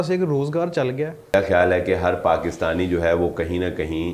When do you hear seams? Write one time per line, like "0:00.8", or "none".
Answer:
0:01.3